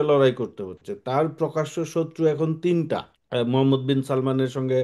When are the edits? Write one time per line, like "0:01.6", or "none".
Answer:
0:03.2

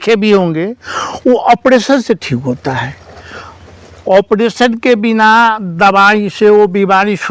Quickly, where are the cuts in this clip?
none

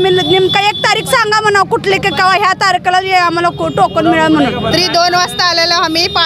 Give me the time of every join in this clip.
0:04.7

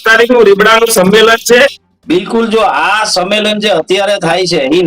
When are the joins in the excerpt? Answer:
0:01.9

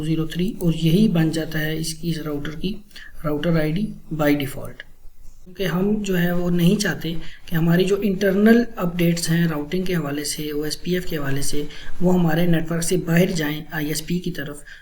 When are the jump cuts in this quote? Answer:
0:05.4

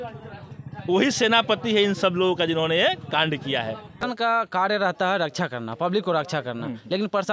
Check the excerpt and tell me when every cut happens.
0:04.0

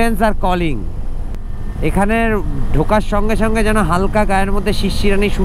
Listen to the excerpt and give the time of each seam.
0:01.1

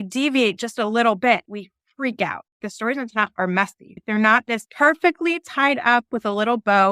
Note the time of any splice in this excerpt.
0:02.6

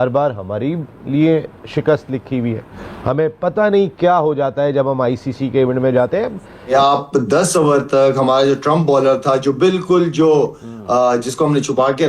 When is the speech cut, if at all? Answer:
0:02.7
0:06.7

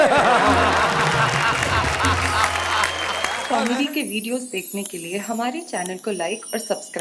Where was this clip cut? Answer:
0:03.4

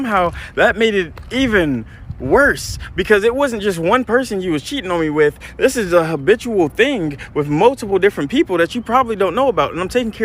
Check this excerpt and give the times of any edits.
0:05.4

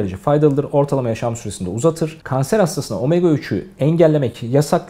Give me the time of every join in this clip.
0:02.2

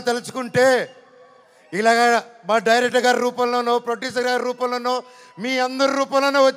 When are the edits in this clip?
none

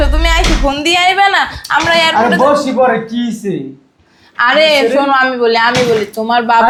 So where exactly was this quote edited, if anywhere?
none

